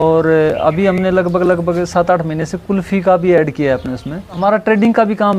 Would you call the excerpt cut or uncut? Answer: cut